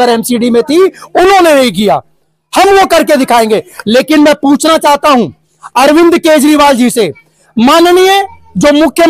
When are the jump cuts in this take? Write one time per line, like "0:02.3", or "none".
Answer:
none